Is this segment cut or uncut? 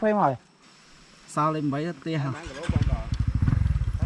cut